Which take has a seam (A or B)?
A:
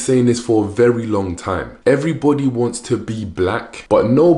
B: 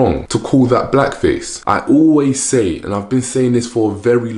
B